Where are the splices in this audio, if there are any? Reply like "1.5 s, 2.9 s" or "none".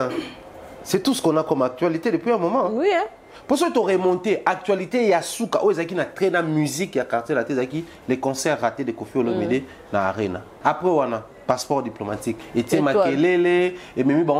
10.5 s, 12.4 s